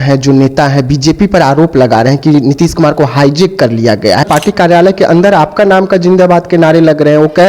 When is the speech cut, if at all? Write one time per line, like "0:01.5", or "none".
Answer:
0:04.2